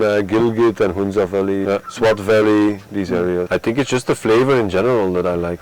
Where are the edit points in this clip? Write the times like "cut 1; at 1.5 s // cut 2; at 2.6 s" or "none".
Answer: cut 1; at 1.6 s // cut 2; at 3.5 s